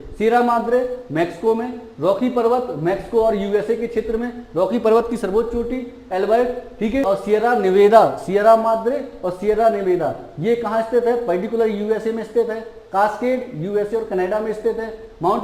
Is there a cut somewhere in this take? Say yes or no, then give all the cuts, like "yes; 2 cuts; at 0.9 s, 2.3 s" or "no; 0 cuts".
yes; 1 cut; at 7.0 s